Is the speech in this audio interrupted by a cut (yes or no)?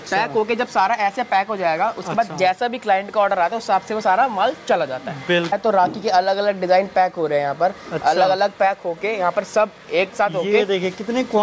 yes